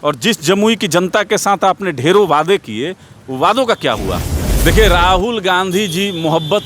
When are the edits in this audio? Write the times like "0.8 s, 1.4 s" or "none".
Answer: 4.3 s